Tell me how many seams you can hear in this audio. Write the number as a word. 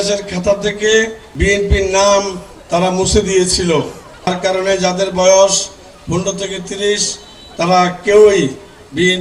two